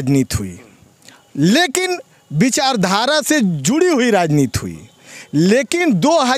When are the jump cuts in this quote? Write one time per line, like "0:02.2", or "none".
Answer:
none